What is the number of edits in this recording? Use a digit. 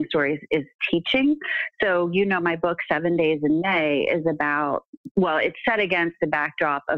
1